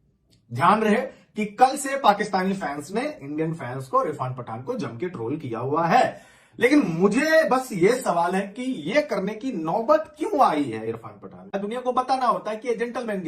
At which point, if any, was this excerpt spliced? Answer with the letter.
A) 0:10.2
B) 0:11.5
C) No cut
B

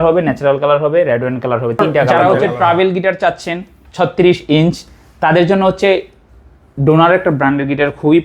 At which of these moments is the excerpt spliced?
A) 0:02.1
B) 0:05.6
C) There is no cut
A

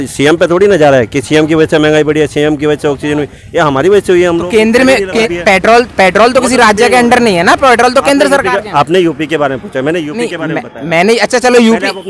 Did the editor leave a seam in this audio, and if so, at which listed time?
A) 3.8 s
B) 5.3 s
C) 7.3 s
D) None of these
B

